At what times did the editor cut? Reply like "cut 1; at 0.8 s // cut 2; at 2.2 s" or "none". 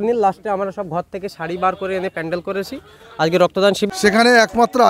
cut 1; at 3.9 s